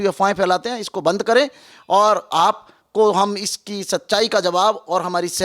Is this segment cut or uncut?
uncut